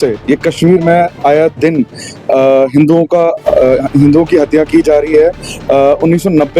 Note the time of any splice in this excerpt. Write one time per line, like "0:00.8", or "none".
none